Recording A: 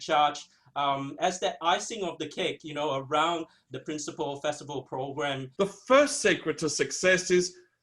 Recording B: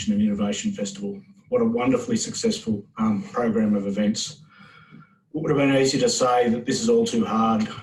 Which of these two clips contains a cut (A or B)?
A